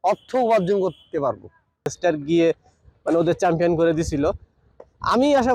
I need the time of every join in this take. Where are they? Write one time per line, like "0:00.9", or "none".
0:01.9